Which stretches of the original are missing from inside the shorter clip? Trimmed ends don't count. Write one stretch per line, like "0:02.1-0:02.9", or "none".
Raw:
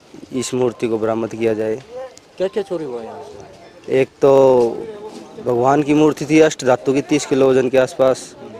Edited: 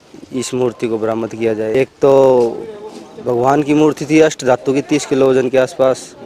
0:01.7-0:03.9